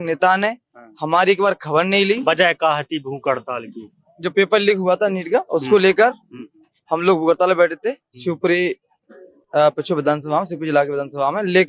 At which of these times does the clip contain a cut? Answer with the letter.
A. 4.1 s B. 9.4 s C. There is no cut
C